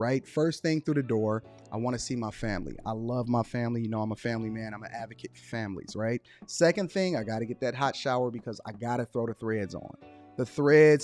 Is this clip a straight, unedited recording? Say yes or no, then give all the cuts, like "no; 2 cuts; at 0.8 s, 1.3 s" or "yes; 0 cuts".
yes; 0 cuts